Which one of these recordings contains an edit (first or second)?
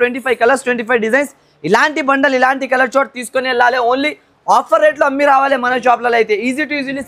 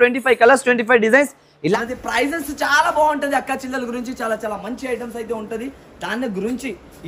second